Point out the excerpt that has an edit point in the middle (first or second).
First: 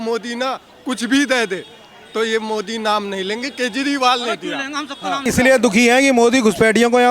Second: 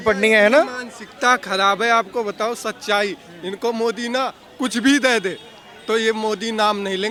first